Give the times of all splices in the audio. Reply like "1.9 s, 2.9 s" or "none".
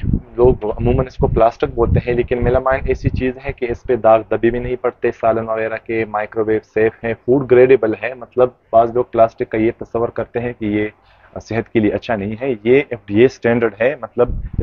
none